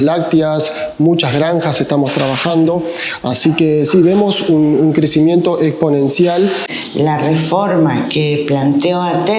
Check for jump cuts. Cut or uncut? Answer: cut